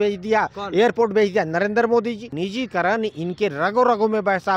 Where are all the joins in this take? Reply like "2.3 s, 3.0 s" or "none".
2.3 s